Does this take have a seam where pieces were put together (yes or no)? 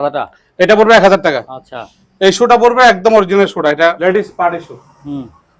yes